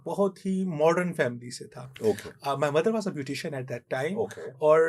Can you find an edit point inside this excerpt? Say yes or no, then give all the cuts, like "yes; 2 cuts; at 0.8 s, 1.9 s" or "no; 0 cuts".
no; 0 cuts